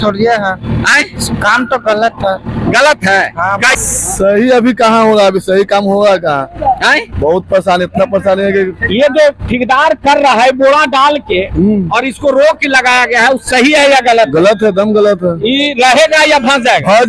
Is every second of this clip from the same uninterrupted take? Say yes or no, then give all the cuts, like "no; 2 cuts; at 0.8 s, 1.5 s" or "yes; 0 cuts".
no; 1 cut; at 3.7 s